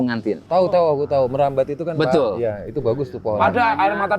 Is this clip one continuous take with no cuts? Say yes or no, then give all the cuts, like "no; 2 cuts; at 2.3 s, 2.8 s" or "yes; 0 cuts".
yes; 0 cuts